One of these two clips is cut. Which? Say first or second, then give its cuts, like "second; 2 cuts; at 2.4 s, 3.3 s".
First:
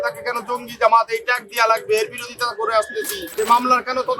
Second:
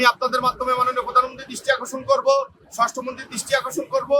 first; 1 cut; at 3.2 s